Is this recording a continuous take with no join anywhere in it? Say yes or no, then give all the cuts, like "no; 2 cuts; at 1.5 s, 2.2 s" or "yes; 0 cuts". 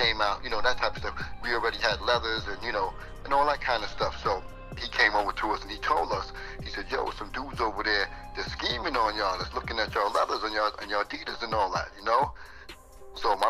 no; 1 cut; at 4.8 s